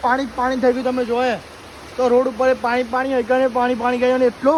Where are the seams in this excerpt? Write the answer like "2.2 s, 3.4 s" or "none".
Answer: none

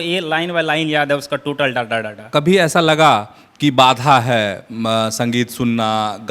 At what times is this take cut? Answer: 2.3 s

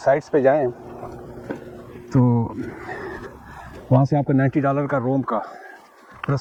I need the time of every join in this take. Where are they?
none

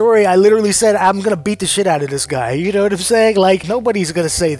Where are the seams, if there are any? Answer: 3.6 s

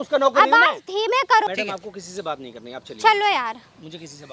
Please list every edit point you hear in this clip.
1.5 s

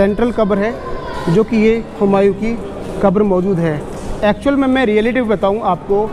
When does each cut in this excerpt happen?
none

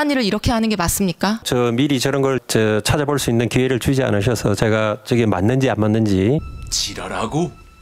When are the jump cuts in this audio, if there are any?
none

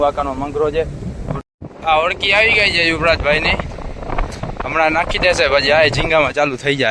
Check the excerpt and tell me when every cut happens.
1.3 s

